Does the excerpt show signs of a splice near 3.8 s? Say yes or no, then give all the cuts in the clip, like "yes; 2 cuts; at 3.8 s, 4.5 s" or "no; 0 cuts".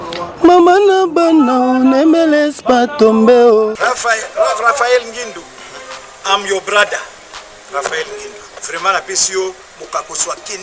yes; 1 cut; at 3.8 s